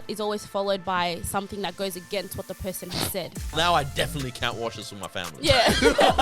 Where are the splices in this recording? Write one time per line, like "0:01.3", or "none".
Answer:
0:03.5